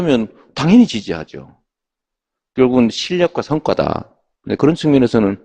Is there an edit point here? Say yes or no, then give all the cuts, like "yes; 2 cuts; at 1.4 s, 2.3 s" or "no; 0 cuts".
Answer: no; 0 cuts